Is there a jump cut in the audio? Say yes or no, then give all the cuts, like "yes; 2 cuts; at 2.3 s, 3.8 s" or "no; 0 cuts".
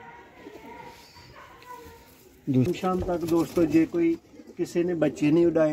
yes; 1 cut; at 2.7 s